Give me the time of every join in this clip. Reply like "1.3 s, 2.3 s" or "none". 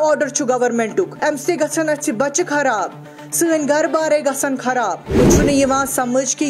1.1 s, 5.2 s